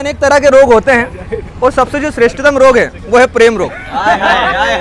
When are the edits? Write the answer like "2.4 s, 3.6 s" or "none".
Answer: none